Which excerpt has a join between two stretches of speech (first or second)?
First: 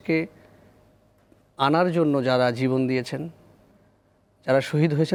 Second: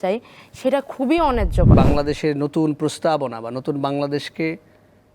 second